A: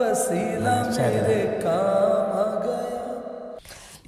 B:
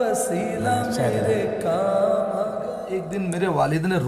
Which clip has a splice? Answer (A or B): B